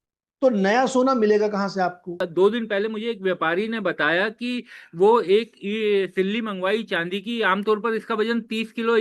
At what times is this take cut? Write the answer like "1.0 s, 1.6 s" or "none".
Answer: 2.1 s

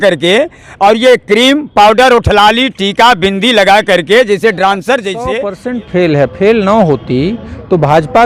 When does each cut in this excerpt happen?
5.2 s

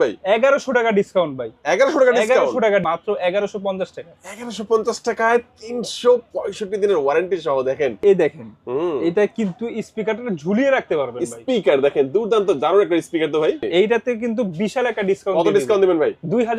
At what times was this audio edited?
2.8 s, 8.0 s, 13.7 s

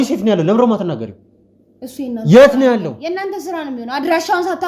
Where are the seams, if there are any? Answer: none

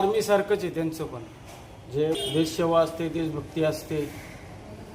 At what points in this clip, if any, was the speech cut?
2.2 s

